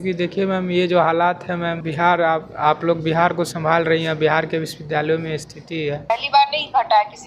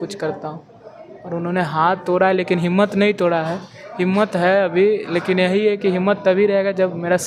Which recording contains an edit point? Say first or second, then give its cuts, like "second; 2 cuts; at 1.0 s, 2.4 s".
first; 2 cuts; at 1.8 s, 6.1 s